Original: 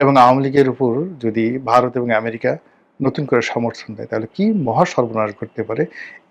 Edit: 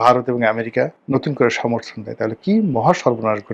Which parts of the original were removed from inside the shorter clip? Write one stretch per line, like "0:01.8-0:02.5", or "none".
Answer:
0:02.7-0:02.9